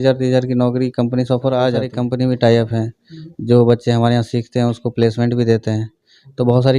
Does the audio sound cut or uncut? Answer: cut